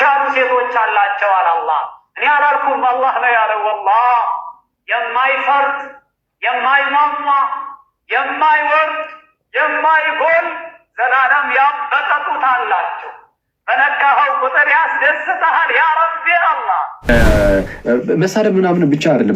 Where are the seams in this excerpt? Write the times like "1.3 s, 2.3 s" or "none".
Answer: 17.1 s